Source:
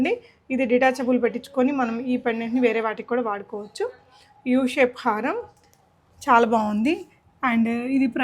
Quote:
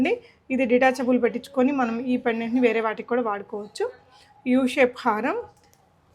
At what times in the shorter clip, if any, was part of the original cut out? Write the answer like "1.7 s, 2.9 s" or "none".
none

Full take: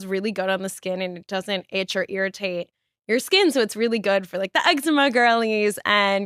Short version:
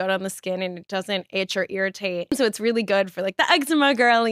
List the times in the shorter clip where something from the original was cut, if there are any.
2.3 s

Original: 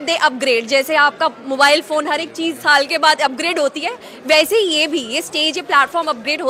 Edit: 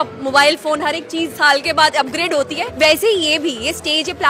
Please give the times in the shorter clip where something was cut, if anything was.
2.6 s

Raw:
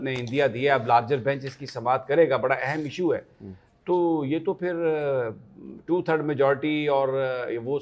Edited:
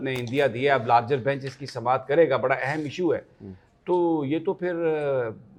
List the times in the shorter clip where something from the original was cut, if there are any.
none

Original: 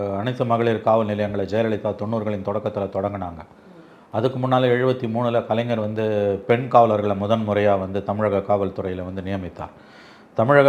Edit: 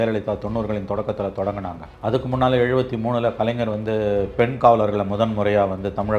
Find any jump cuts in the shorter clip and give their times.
1.8 s

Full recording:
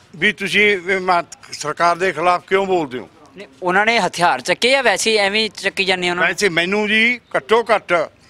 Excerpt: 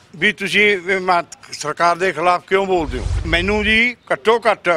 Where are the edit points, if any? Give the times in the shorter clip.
3.3 s

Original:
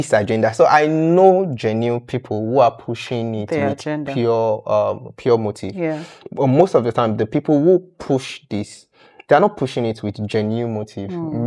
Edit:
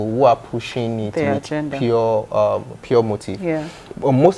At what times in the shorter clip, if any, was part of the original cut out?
none

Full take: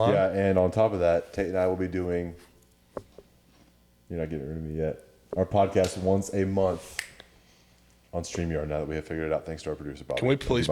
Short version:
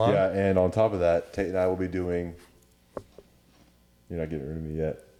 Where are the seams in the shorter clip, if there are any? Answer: none

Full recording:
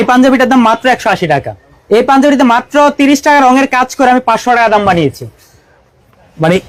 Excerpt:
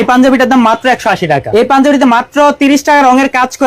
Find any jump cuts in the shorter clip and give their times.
1.4 s

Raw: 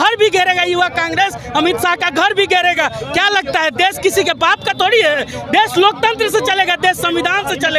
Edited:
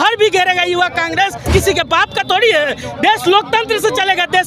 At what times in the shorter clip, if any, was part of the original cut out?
1.5 s

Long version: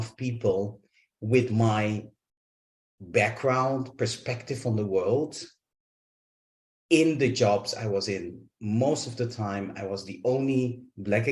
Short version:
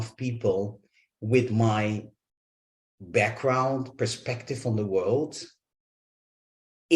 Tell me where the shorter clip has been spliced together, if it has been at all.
none

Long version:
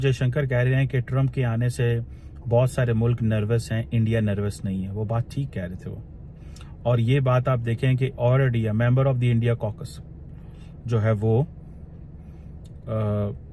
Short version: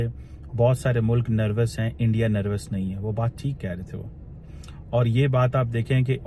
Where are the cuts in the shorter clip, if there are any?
none

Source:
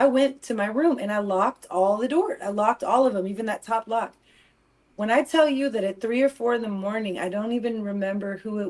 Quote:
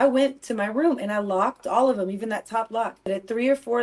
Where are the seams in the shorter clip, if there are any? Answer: 1.6 s, 3.0 s

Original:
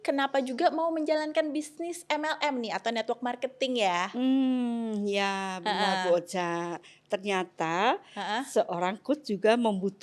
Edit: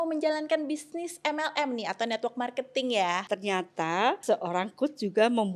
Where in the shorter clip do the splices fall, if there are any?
3.2 s, 4.2 s

